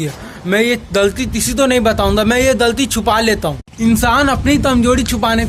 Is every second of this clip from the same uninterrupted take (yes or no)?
no